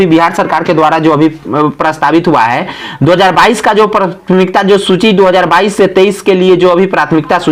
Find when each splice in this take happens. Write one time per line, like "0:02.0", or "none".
none

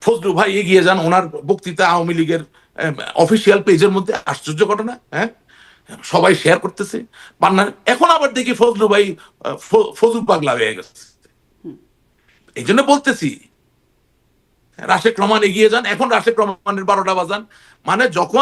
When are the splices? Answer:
none

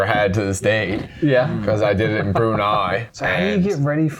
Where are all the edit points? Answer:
0:03.1

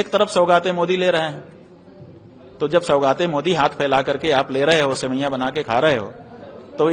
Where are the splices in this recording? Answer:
none

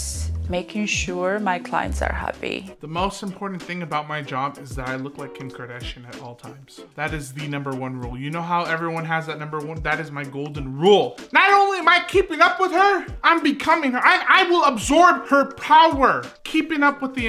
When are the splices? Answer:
0:15.2
0:16.3

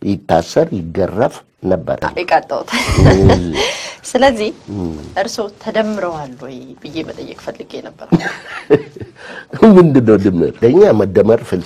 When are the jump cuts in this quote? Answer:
0:02.1
0:10.6

